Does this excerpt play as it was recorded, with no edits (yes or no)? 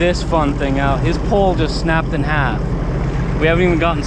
yes